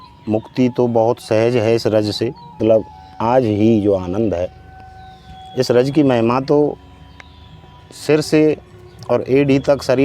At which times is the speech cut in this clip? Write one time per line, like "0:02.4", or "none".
0:02.6